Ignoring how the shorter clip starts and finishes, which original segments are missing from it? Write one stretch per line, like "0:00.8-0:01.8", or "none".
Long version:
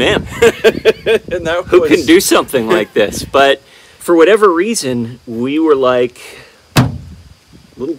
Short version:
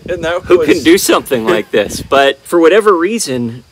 0:03.6-0:04.0